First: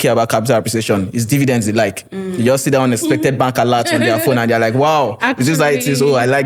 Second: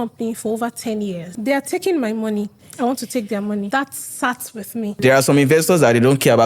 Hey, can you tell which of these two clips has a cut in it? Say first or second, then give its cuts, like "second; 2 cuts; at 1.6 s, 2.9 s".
second; 4 cuts; at 1.3 s, 2.6 s, 3.7 s, 4.9 s